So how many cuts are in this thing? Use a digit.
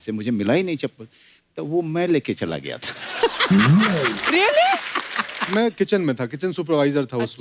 1